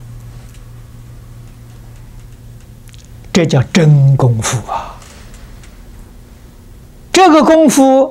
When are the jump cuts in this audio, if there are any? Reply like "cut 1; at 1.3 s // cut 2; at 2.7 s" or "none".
cut 1; at 7.0 s